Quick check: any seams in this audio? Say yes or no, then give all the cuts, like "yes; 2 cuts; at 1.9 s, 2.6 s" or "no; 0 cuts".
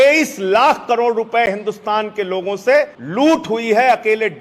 yes; 1 cut; at 3.0 s